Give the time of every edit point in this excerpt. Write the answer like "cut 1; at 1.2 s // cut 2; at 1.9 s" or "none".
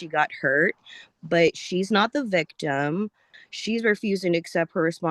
cut 1; at 3.3 s